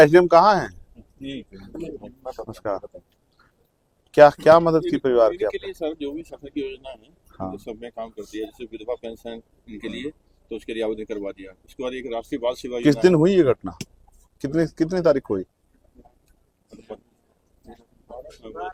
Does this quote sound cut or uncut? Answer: uncut